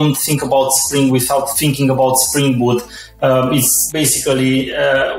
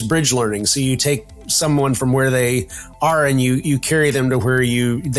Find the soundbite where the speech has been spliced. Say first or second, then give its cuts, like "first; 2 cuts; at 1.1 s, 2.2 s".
first; 3 cuts; at 1.5 s, 3.0 s, 3.8 s